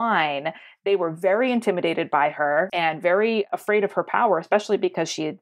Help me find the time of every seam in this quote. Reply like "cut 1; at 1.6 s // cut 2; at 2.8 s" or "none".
cut 1; at 3.6 s